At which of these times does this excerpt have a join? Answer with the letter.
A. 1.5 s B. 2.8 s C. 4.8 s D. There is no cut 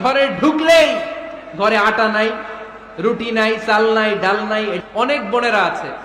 C